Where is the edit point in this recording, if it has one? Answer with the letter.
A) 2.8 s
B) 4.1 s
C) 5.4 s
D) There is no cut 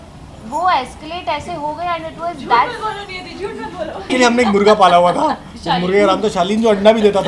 B